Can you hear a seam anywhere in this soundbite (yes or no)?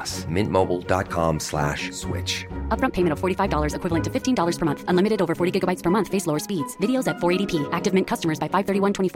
no